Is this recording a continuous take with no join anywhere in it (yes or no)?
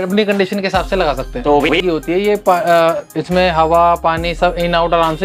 no